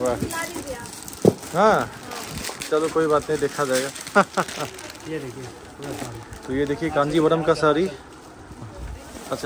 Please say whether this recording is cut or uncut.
uncut